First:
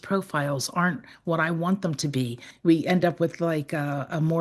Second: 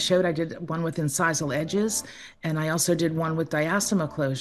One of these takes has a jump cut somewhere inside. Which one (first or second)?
first